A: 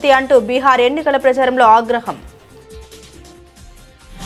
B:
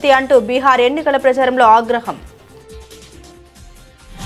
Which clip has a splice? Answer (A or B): B